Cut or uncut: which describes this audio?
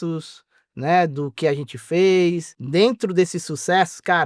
cut